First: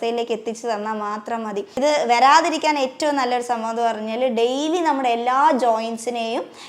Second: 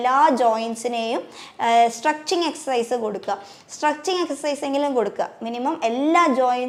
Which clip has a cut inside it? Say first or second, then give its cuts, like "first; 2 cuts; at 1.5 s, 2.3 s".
first; 1 cut; at 1.8 s